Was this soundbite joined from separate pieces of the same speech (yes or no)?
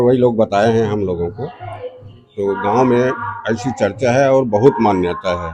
no